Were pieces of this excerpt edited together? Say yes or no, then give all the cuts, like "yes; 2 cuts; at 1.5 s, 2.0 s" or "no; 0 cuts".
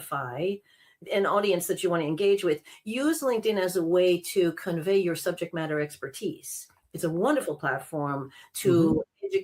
yes; 1 cut; at 1.0 s